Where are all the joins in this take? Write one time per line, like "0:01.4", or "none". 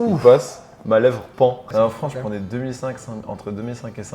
0:01.6